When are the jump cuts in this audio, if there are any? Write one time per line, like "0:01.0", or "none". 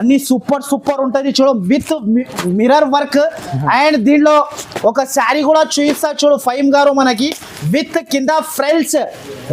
none